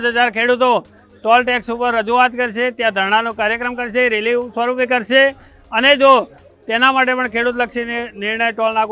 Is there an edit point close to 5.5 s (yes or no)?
no